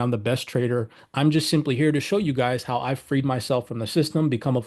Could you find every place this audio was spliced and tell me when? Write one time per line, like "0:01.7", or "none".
0:01.0